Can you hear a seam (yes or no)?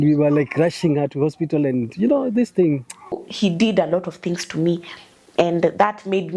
yes